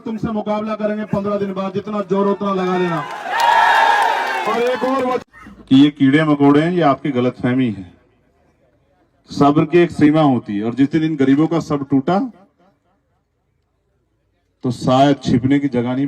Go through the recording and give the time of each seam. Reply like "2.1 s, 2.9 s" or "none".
5.2 s